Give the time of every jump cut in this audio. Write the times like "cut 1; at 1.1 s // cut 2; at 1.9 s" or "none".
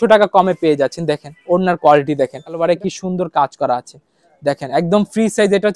cut 1; at 2.5 s